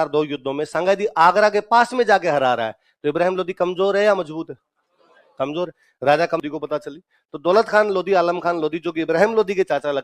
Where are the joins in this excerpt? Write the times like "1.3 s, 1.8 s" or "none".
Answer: 6.4 s